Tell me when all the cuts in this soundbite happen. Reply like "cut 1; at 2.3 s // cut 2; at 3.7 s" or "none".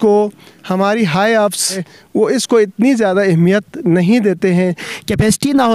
cut 1; at 1.9 s // cut 2; at 4.8 s